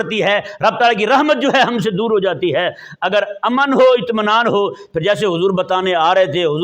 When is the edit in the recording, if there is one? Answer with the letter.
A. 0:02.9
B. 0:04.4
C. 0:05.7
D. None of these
D